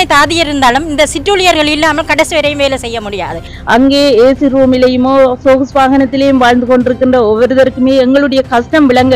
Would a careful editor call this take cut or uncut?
cut